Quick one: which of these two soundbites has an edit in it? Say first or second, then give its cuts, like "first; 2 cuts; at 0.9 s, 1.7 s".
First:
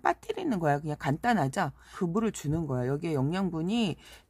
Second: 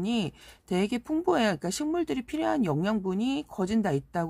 first; 1 cut; at 1.9 s